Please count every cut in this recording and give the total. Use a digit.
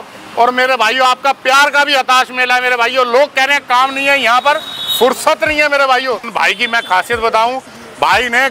1